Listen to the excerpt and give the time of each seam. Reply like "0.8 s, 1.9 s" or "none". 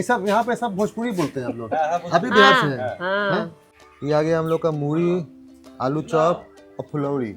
3.9 s